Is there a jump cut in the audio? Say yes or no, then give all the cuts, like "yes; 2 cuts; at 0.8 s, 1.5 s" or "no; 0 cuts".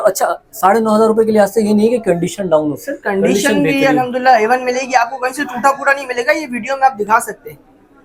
no; 0 cuts